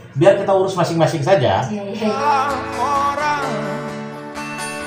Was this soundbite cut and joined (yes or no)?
no